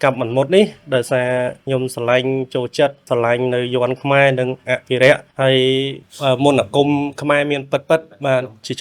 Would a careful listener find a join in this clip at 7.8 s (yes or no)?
no